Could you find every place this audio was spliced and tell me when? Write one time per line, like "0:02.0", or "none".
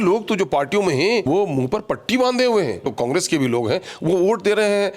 0:01.2
0:02.9